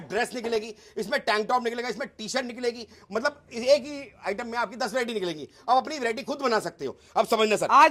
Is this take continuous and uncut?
yes; 0 cuts

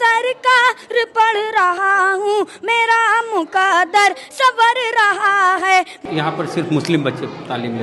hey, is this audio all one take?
no; 1 cut; at 6.0 s

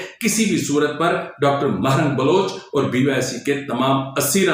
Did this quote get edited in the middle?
no; 0 cuts

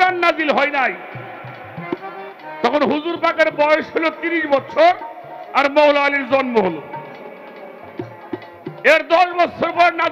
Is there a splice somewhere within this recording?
no; 0 cuts

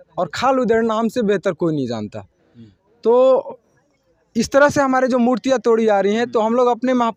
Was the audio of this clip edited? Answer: no; 0 cuts

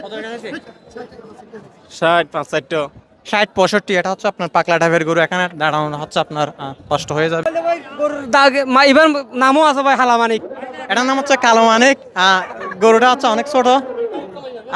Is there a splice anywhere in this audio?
yes; 1 cut; at 7.4 s

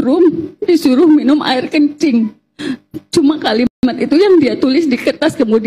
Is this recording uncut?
yes; 0 cuts

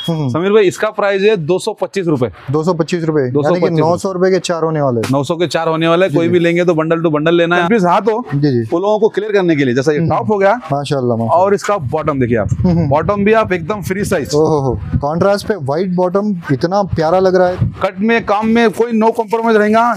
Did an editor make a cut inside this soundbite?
yes; 2 cuts; at 7.6 s, 17.4 s

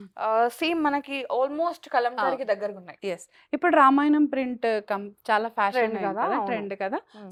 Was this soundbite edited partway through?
no; 0 cuts

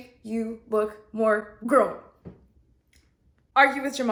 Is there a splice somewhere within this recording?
no; 0 cuts

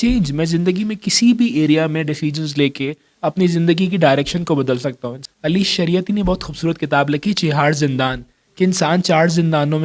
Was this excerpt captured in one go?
no; 1 cut; at 5.1 s

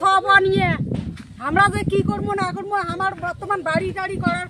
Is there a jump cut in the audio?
no; 0 cuts

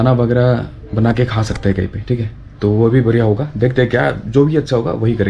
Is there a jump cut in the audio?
no; 0 cuts

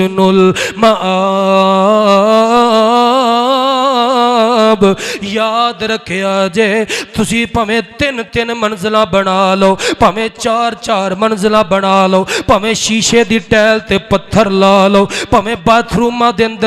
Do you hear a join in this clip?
no; 0 cuts

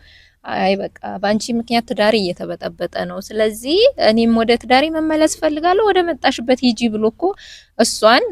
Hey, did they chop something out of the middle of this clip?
no; 0 cuts

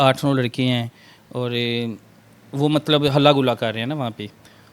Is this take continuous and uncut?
yes; 0 cuts

